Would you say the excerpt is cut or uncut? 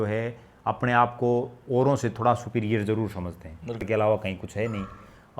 cut